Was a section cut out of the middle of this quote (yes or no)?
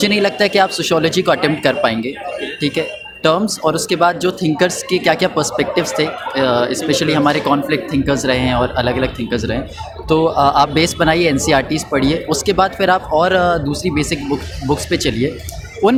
no